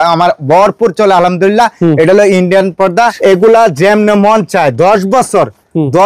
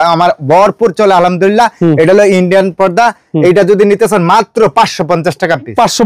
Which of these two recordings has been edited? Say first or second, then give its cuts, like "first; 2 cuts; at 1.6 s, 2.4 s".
first; 1 cut; at 3.1 s